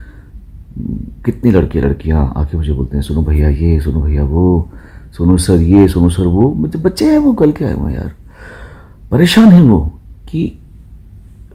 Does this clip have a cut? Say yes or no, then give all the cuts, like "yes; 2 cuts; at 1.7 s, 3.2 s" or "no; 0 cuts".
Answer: no; 0 cuts